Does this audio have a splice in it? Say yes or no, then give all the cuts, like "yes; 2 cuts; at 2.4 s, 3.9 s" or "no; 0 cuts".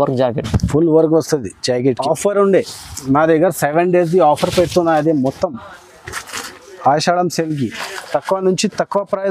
yes; 1 cut; at 1.9 s